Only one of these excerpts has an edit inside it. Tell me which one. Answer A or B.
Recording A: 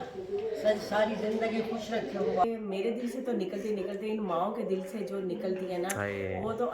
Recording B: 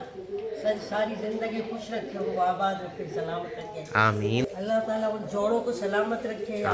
A